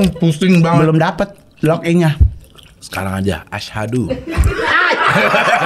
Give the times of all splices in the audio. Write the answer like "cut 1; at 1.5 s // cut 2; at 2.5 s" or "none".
none

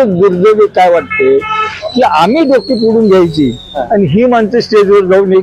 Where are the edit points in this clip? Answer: none

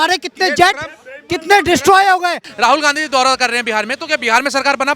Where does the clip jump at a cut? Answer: cut 1; at 2.5 s

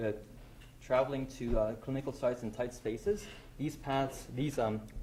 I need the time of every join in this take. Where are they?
none

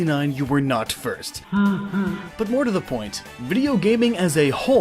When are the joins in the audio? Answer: cut 1; at 1.5 s

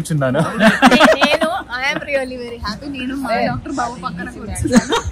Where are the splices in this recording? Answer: none

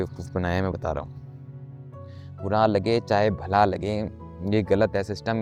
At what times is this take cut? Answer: none

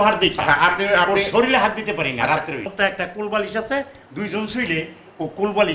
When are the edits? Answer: cut 1; at 2.7 s

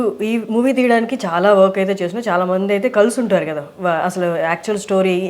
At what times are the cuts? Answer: none

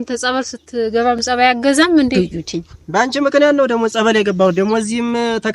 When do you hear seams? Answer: cut 1; at 2.1 s

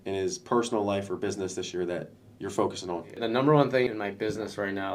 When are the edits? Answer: cut 1; at 3.1 s

